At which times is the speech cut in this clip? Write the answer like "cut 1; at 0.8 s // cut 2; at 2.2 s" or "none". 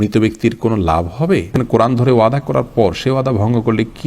cut 1; at 1.5 s